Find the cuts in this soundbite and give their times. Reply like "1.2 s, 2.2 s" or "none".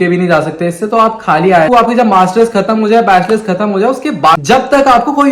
1.7 s, 4.4 s